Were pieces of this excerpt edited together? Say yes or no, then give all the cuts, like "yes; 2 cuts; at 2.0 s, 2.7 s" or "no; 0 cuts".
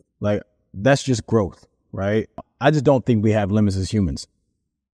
yes; 1 cut; at 2.5 s